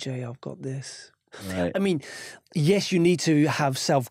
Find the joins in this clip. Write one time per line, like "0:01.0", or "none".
0:01.4